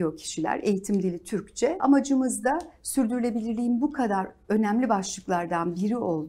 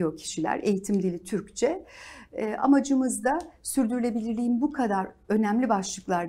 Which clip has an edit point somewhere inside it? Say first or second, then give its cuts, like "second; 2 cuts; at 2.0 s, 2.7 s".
first; 1 cut; at 1.8 s